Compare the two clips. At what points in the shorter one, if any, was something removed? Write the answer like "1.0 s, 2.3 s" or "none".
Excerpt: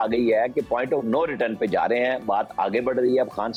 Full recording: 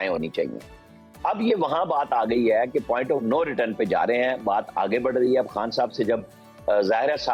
none